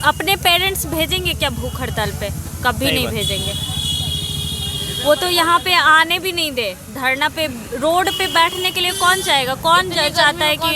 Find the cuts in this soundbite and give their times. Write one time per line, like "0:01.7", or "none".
none